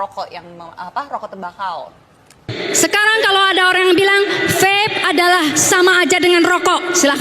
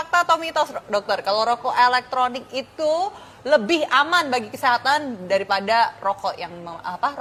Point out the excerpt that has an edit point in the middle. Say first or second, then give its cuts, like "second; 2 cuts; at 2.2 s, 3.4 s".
first; 1 cut; at 2.6 s